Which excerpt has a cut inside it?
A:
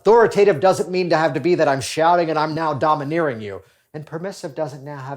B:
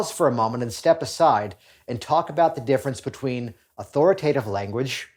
A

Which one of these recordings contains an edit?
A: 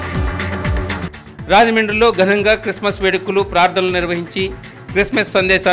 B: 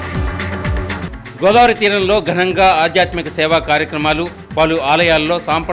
B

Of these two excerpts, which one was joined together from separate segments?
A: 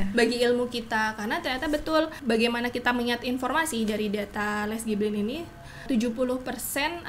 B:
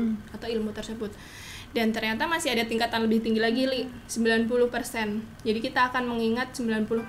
A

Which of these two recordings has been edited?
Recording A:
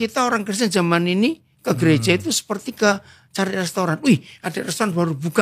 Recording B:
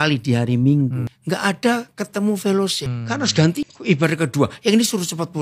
B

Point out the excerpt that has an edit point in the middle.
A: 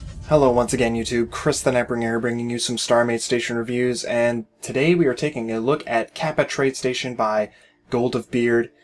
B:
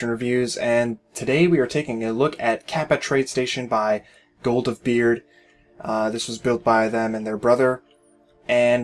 B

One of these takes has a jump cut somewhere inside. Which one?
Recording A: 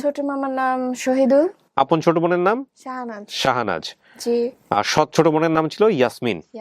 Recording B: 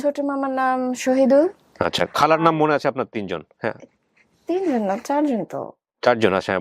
A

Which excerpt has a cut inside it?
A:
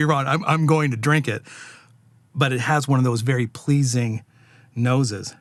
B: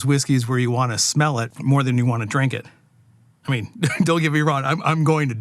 B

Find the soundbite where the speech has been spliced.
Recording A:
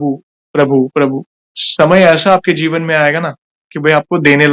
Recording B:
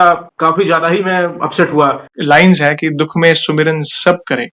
B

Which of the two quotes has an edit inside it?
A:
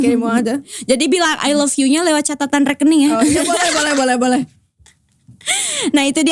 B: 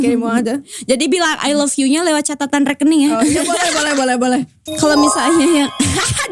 B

